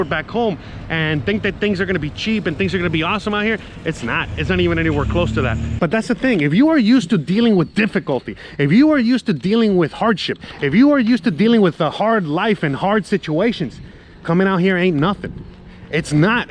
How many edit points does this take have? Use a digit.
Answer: 1